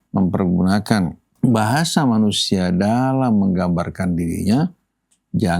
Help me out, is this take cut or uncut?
cut